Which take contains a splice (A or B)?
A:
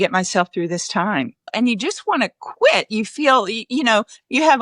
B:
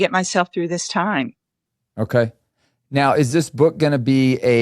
A